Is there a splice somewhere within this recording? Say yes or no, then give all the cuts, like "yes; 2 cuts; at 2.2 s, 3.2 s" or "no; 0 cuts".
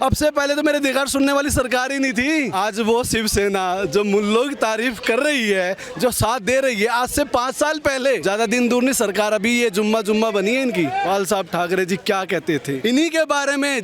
yes; 4 cuts; at 2.5 s, 8.2 s, 11.0 s, 12.8 s